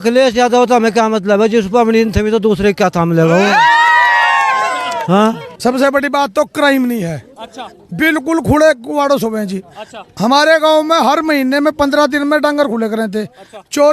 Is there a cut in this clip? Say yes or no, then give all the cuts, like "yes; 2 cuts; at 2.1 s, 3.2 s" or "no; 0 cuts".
yes; 1 cut; at 5.5 s